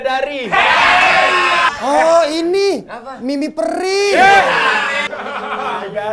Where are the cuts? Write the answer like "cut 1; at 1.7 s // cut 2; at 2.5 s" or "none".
cut 1; at 1.7 s // cut 2; at 5.0 s

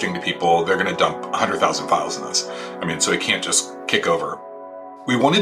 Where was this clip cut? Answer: cut 1; at 4.4 s

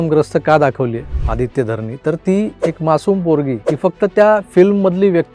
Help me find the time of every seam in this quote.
cut 1; at 1.1 s // cut 2; at 2.6 s // cut 3; at 3.7 s

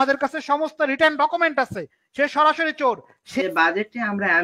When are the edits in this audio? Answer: cut 1; at 3.4 s

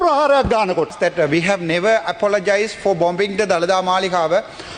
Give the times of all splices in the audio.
cut 1; at 0.9 s

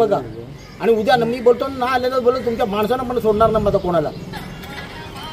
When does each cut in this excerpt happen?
none

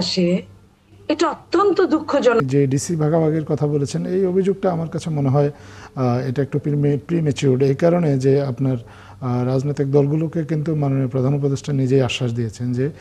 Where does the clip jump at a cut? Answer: cut 1; at 2.4 s

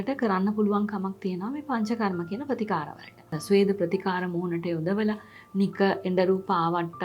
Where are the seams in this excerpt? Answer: cut 1; at 3.4 s

